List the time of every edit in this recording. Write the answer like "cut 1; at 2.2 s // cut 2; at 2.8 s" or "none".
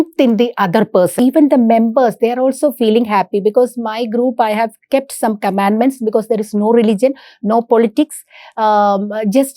cut 1; at 1.1 s